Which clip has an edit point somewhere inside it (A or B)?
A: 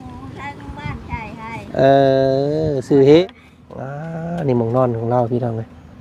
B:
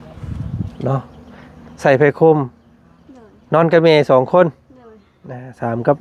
A